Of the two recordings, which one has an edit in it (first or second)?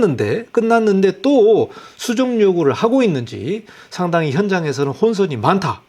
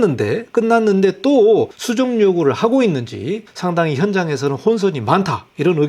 second